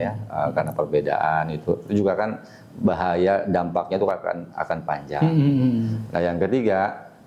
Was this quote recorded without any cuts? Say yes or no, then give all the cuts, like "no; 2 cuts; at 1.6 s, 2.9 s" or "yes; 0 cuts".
yes; 0 cuts